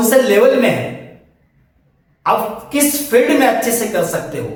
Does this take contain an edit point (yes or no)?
no